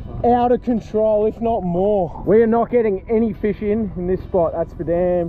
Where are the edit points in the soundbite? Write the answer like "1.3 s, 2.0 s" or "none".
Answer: 2.2 s